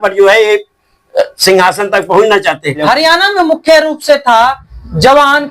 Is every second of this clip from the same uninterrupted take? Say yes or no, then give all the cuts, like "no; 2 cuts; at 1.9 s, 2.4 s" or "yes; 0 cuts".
no; 1 cut; at 2.8 s